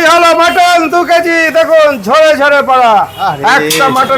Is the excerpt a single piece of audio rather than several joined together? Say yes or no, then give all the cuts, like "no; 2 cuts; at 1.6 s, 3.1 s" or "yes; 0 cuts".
yes; 0 cuts